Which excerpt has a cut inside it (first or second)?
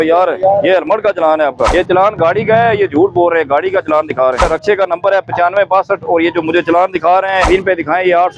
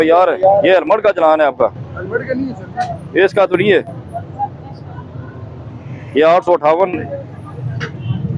first